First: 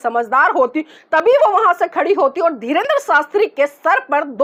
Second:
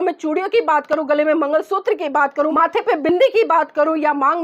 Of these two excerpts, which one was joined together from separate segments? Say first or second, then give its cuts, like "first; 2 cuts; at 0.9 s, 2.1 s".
second; 1 cut; at 2.5 s